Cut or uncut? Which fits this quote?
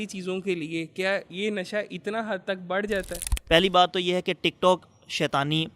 cut